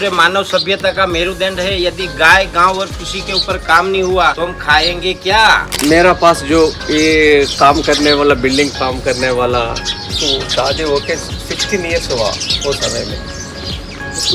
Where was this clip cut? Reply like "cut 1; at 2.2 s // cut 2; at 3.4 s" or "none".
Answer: cut 1; at 4.4 s // cut 2; at 5.7 s

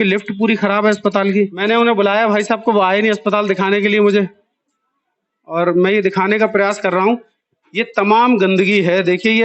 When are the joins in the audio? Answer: cut 1; at 1.6 s

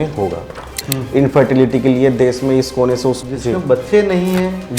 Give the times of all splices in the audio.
cut 1; at 0.9 s // cut 2; at 3.2 s

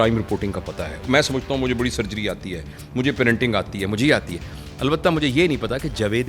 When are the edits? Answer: cut 1; at 1.0 s

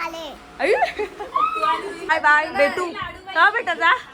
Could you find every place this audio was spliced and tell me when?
cut 1; at 2.1 s

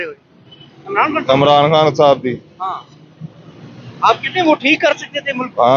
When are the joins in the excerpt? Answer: none

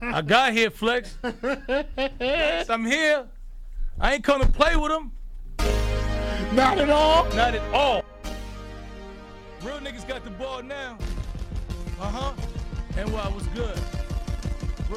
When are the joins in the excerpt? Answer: cut 1; at 8.0 s

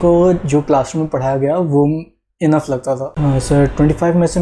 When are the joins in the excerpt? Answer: cut 1; at 3.1 s

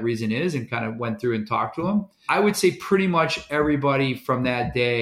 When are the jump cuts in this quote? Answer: cut 1; at 2.2 s

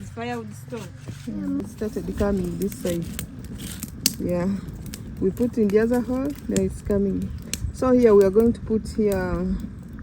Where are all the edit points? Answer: cut 1; at 1.5 s

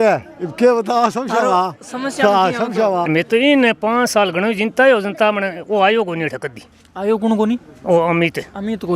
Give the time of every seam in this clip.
cut 1; at 3.1 s

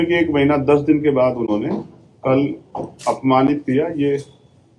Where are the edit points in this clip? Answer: none

